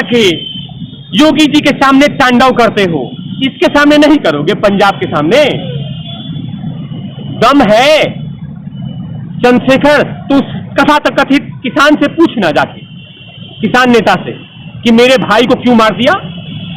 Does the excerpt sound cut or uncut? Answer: uncut